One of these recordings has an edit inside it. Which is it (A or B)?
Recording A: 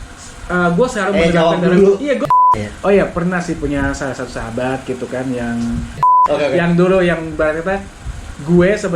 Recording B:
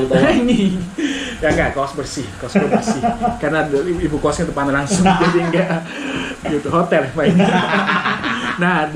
A